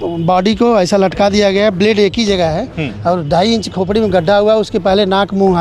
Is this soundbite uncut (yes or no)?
yes